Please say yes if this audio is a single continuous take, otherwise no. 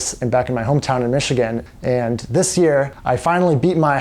no